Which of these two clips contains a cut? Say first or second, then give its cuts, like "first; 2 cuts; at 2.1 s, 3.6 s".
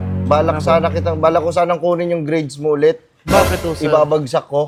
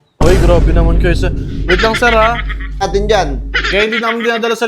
second; 1 cut; at 2.8 s